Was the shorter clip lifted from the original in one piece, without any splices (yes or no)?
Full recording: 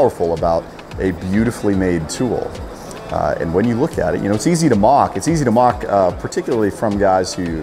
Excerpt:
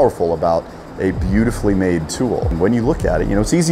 no